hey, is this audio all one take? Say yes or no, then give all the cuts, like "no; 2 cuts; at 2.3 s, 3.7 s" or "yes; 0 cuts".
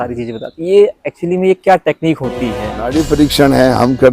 no; 1 cut; at 2.8 s